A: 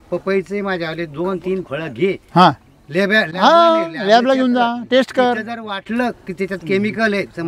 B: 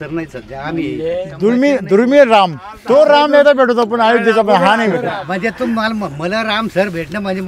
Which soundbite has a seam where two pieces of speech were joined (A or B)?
B